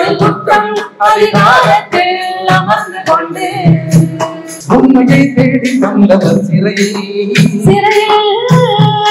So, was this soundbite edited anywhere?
yes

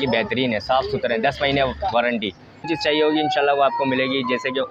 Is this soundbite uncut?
no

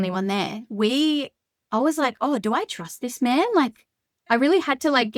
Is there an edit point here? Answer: no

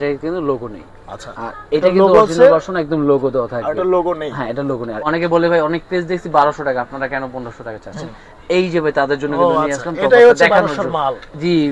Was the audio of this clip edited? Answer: yes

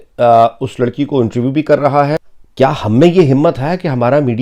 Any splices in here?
yes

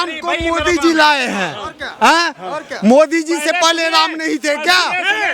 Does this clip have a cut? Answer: no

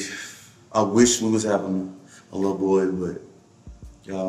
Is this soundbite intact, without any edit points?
yes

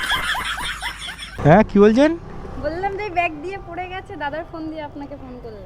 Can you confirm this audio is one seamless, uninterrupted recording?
no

